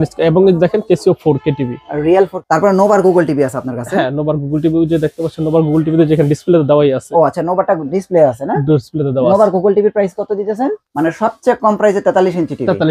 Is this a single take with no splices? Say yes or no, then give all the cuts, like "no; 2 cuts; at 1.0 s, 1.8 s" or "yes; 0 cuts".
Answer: no; 2 cuts; at 2.4 s, 10.8 s